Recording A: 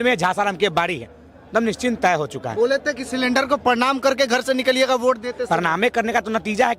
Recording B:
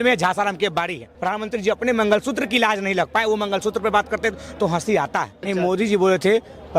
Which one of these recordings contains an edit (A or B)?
B